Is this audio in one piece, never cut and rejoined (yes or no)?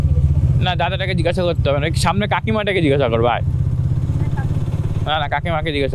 yes